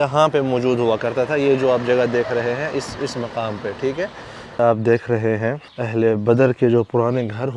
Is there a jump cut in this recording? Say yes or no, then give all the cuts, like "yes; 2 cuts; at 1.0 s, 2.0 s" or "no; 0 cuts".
yes; 2 cuts; at 4.6 s, 5.7 s